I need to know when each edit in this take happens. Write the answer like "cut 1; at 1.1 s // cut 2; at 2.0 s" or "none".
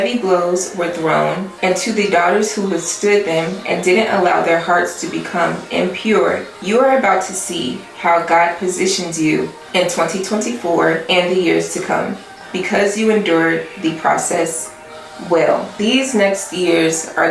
cut 1; at 6.5 s // cut 2; at 9.6 s // cut 3; at 11.0 s